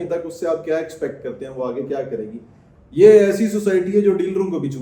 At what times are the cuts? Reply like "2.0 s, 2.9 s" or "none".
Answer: 2.6 s

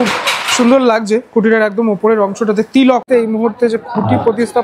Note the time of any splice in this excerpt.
3.1 s

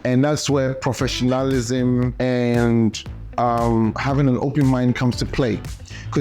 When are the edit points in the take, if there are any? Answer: 2.1 s, 4.0 s

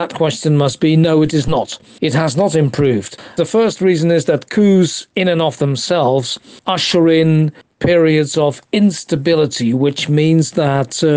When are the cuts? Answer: 3.2 s

